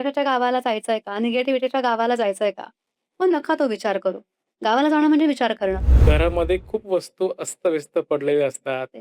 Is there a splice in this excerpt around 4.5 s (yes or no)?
no